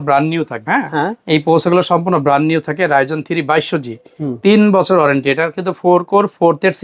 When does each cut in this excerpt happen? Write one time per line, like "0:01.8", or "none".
none